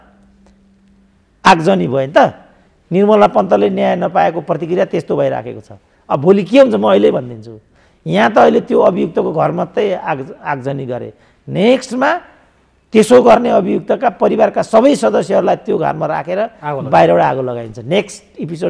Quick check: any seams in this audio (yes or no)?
no